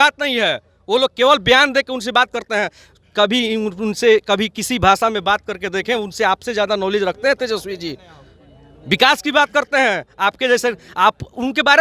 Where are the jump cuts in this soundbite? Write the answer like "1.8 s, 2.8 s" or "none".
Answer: none